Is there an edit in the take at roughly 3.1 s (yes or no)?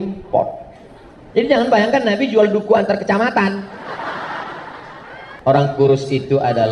no